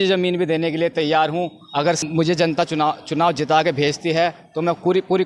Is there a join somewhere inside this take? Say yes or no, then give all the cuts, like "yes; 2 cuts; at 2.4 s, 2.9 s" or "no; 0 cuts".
yes; 1 cut; at 2.0 s